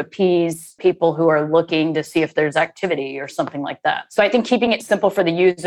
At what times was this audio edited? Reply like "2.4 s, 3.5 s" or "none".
0.8 s, 4.0 s, 4.8 s